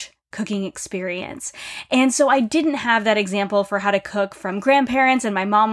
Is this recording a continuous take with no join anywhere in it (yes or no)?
yes